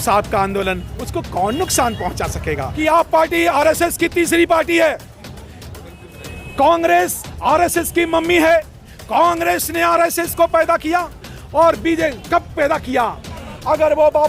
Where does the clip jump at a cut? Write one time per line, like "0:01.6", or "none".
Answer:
0:02.7
0:13.3